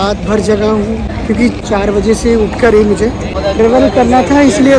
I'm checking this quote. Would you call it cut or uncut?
uncut